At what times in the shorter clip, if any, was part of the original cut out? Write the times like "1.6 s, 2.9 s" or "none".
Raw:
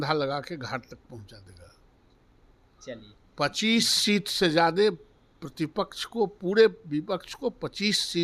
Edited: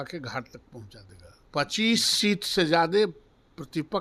1.3 s